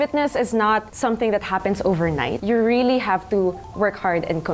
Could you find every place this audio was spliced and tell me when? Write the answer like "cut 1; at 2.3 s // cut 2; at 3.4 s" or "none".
cut 1; at 0.9 s // cut 2; at 2.4 s